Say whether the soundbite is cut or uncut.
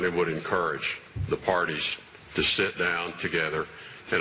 uncut